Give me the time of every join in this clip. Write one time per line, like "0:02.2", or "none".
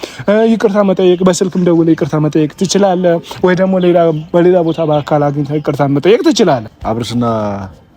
0:06.7